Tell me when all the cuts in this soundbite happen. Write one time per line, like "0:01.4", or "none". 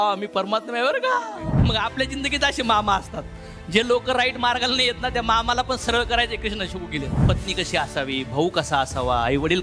0:01.6
0:07.2